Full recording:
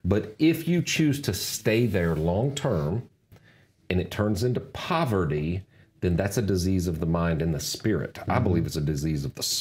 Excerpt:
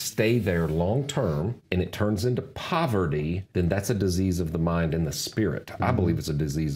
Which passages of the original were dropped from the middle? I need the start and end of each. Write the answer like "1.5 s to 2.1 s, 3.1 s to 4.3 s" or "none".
3.1 s to 3.8 s, 5.6 s to 5.9 s